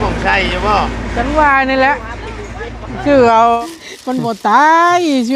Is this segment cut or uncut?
cut